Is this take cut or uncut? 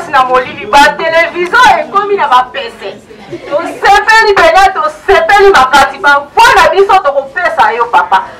uncut